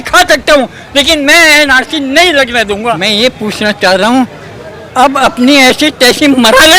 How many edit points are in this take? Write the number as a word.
one